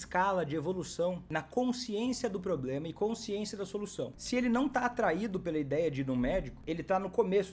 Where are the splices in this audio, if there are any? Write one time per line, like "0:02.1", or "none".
0:01.2
0:04.2
0:06.5